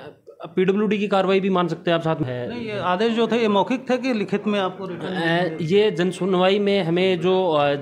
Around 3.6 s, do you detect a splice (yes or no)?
no